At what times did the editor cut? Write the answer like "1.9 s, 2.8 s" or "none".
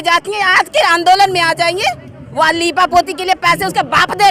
none